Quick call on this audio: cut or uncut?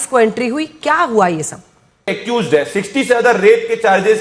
cut